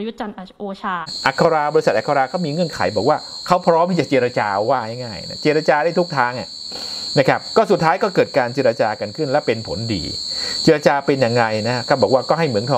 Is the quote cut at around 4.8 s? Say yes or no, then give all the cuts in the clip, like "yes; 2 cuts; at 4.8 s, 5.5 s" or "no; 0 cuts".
no; 1 cut; at 1.1 s